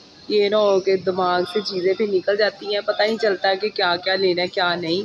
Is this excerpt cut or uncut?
uncut